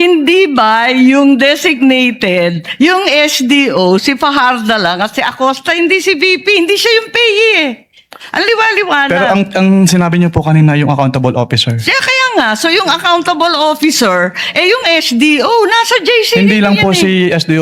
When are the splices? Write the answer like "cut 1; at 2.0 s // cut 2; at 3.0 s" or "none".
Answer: none